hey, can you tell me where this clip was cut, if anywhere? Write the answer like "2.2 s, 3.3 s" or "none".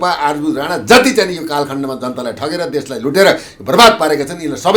none